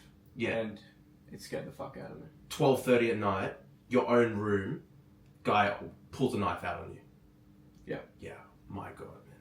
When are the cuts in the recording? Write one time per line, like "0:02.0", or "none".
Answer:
none